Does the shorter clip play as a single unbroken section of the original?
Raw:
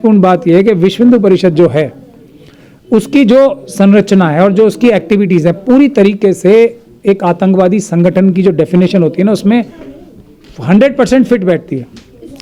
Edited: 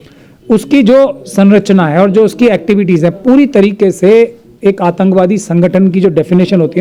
yes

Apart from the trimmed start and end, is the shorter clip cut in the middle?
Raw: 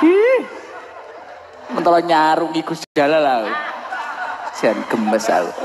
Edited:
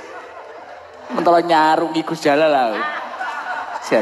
yes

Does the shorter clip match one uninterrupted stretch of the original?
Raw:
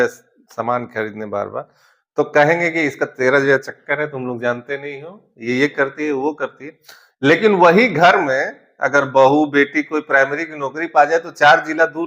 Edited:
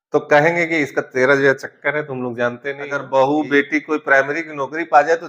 no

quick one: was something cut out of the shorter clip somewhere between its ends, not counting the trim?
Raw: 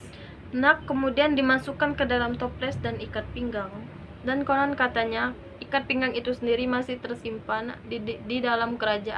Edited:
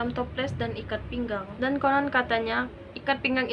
yes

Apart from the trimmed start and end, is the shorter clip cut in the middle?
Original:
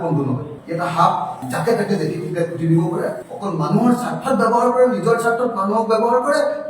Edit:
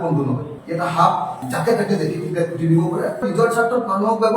yes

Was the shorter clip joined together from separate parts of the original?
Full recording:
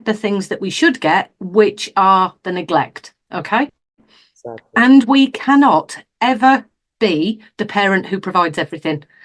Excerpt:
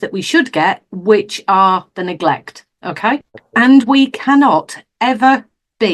yes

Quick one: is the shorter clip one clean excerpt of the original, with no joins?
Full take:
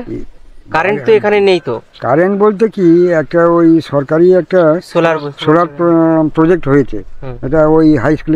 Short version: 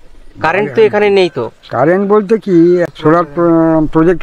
no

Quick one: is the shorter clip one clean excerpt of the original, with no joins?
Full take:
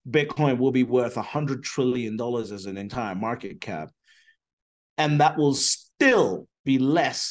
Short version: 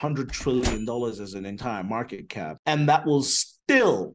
no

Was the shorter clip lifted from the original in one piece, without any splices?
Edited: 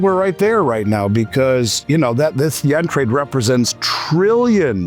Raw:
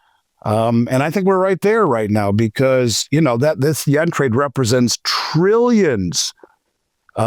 yes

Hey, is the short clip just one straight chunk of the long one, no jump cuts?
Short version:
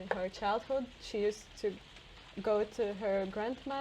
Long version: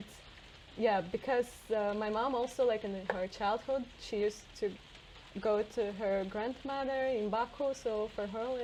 yes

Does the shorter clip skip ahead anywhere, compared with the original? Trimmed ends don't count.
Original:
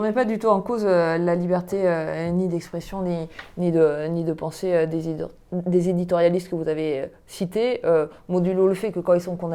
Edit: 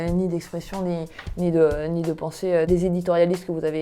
yes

